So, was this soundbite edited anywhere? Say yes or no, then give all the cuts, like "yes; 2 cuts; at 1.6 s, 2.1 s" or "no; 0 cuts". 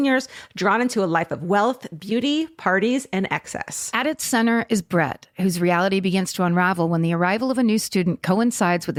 no; 0 cuts